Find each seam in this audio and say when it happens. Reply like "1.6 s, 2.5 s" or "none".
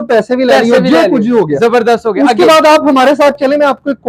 none